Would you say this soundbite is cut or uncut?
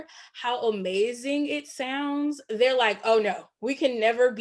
uncut